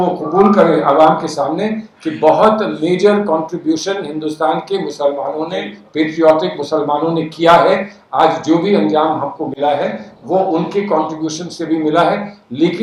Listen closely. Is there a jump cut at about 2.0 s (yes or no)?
no